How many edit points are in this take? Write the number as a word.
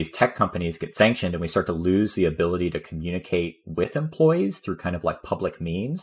zero